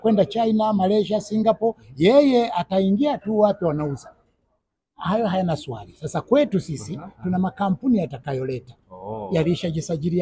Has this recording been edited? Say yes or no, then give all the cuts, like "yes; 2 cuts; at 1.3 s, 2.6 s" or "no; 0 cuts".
no; 0 cuts